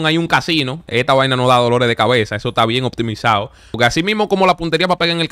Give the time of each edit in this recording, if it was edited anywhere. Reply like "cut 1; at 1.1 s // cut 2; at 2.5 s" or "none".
cut 1; at 3.8 s